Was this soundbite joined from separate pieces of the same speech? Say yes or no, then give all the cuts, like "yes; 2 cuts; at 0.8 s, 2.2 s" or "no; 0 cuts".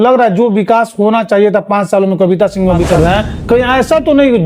yes; 1 cut; at 2.8 s